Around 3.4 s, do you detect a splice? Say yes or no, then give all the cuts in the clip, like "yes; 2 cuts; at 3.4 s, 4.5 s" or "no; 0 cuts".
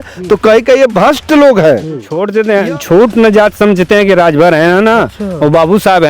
no; 1 cut; at 2.1 s